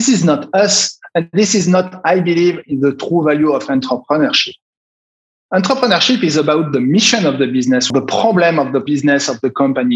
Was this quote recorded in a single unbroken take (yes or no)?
no